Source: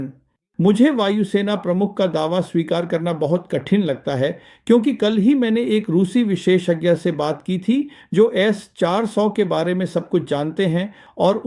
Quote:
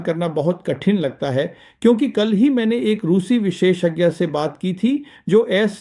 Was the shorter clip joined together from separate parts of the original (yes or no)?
no